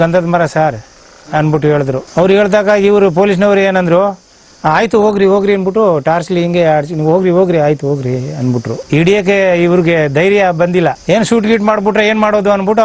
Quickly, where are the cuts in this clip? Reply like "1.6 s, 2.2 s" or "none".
none

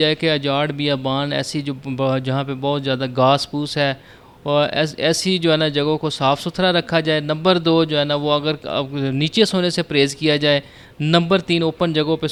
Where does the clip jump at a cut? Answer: none

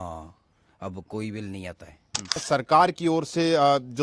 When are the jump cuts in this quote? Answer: 2.4 s

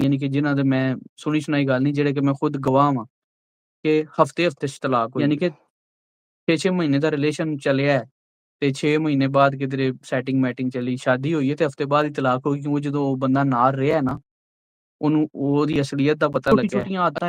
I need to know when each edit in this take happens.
5.1 s, 16.5 s

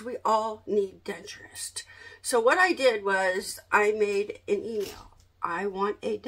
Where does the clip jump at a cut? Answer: none

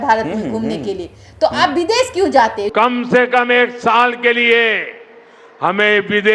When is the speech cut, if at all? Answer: 2.7 s

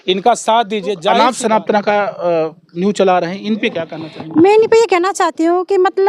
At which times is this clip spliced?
1.2 s

